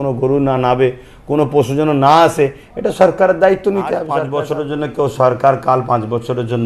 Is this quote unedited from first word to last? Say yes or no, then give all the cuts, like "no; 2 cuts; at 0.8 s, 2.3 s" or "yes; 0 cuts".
no; 1 cut; at 4.3 s